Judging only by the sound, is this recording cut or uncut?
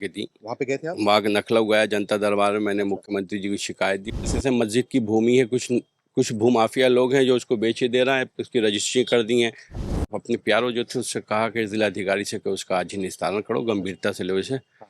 cut